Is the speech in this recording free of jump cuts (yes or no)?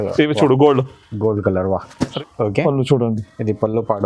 no